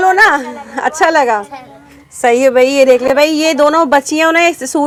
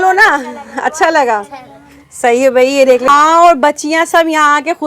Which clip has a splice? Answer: second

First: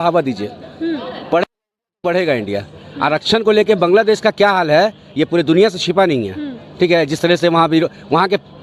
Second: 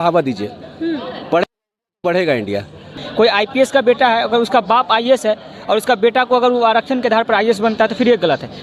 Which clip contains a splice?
second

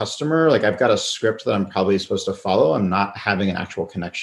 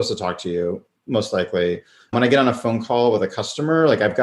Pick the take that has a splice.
second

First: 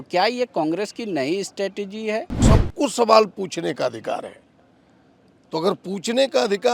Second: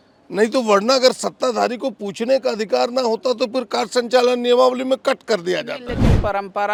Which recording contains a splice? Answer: first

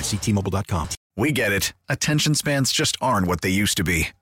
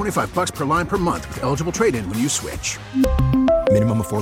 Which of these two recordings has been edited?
first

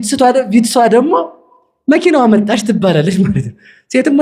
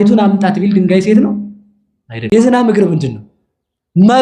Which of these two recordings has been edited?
second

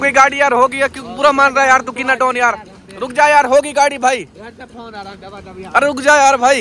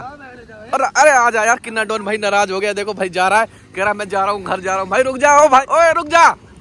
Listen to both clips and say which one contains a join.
second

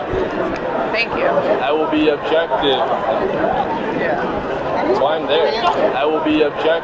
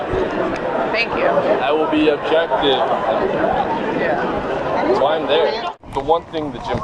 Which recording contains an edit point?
second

